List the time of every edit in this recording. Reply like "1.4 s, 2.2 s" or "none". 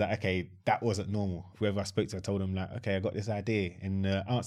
1.4 s